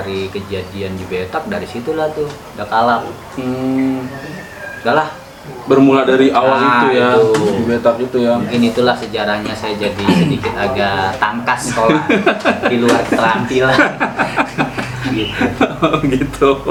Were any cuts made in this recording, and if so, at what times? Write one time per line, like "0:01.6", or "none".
none